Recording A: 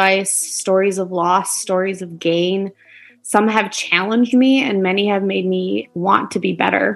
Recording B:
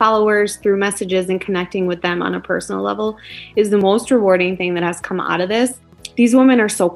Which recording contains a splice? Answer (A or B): B